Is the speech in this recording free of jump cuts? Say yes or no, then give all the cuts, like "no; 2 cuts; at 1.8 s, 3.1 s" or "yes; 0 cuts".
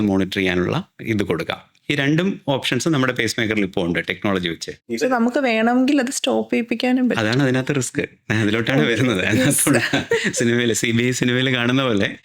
yes; 0 cuts